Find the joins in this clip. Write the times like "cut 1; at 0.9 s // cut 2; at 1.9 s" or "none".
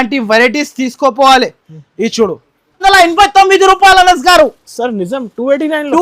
cut 1; at 2.8 s